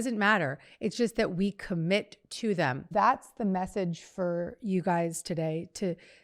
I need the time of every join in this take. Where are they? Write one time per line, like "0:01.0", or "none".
0:02.9